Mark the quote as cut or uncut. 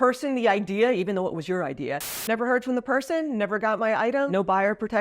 cut